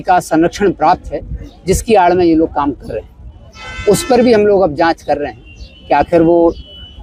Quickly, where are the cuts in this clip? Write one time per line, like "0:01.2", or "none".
none